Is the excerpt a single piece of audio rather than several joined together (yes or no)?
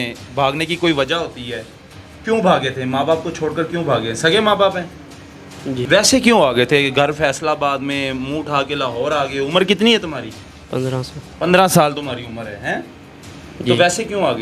no